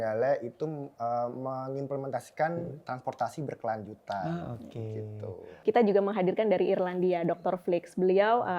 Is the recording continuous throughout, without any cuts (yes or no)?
no